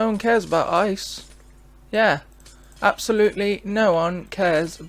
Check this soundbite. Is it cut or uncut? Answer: uncut